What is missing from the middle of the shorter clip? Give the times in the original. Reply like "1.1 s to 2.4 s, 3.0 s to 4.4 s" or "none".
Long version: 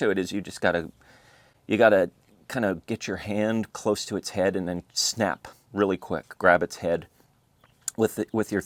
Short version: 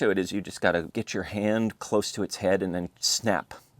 1.0 s to 2.9 s